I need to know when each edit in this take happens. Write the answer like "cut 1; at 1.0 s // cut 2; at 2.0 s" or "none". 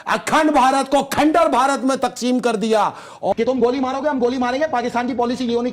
cut 1; at 3.3 s